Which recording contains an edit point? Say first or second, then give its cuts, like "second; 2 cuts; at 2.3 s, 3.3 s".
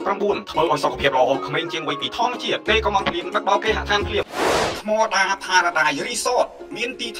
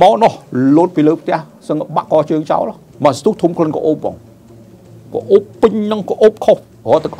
second; 1 cut; at 2.8 s